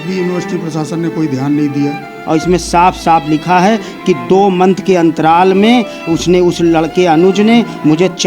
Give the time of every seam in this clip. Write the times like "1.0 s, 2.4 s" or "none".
2.2 s

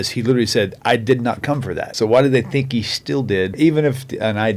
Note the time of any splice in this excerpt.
1.9 s, 3.5 s

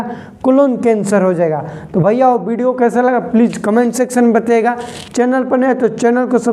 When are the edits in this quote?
none

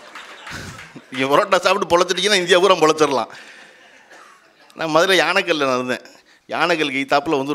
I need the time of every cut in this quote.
none

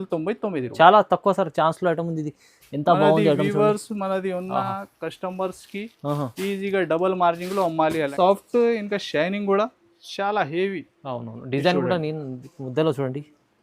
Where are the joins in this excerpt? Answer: 8.1 s

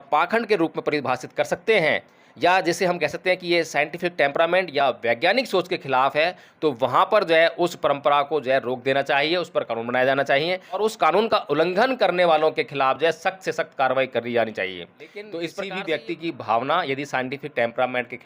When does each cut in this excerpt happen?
10.8 s, 15.3 s

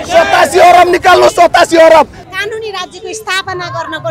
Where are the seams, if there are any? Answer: 2.2 s

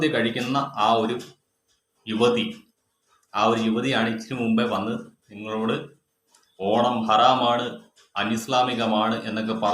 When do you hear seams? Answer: none

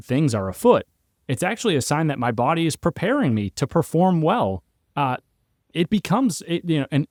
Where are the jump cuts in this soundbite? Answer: none

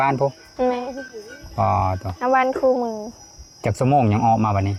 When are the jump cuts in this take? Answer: none

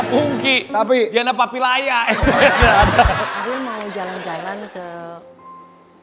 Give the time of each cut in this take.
3.2 s

